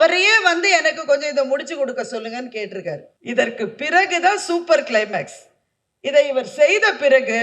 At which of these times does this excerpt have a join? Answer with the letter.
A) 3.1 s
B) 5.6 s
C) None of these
A